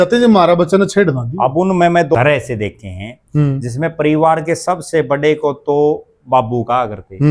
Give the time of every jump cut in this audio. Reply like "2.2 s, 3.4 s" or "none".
2.2 s